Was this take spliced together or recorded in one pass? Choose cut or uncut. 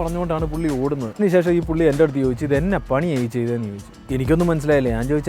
cut